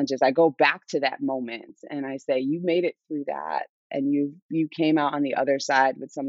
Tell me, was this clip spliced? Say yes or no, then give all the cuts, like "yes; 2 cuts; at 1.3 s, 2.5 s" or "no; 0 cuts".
no; 0 cuts